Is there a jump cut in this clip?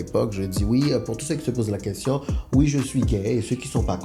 no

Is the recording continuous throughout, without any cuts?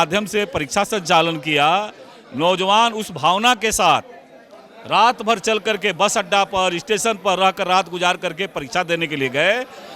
yes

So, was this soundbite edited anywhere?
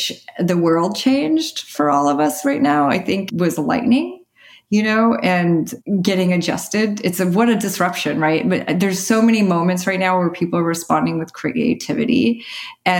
yes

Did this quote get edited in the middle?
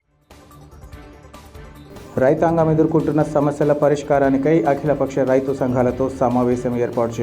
no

